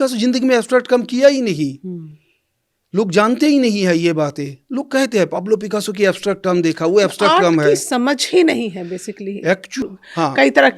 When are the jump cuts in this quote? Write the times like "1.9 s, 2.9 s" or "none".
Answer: 9.8 s